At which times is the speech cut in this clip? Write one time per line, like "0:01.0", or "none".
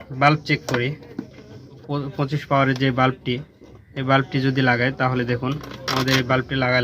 0:01.8